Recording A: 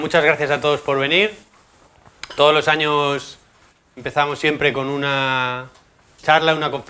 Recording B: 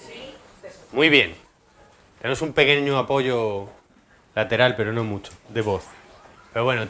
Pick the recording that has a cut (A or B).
A